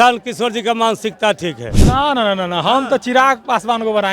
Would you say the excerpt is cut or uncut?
cut